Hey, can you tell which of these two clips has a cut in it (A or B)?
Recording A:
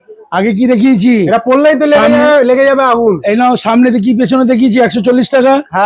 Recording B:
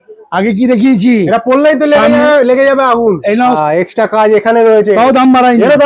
B